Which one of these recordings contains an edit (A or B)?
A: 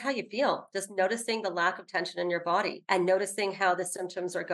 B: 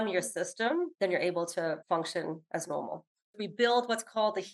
B